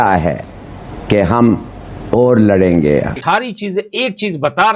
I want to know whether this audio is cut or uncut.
cut